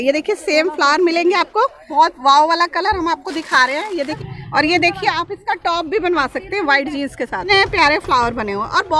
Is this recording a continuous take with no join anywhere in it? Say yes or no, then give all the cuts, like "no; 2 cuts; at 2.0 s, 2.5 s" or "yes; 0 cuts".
no; 3 cuts; at 1.8 s, 4.2 s, 7.5 s